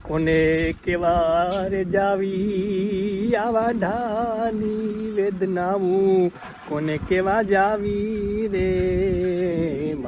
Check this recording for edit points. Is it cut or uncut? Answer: uncut